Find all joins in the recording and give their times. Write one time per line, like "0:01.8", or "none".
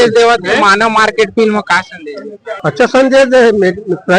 0:02.5

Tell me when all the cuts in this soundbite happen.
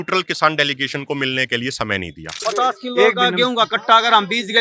0:02.4

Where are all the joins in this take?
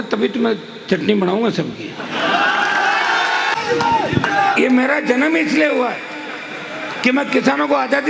0:03.5

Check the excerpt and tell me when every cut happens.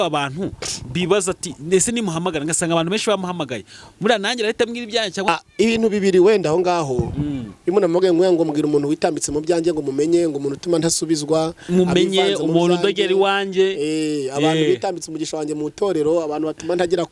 0:05.3

